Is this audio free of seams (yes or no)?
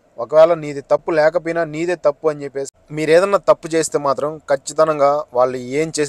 no